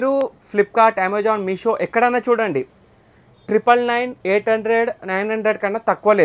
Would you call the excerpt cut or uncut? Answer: uncut